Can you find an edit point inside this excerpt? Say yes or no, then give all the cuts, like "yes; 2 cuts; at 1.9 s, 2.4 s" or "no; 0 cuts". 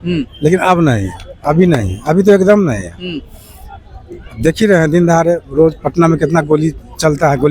no; 0 cuts